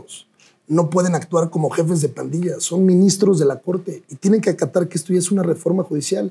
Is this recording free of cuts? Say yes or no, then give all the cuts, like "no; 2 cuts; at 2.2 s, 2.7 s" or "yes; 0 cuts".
yes; 0 cuts